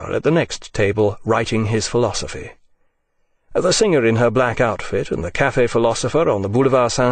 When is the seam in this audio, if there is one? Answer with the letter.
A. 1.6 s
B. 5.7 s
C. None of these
C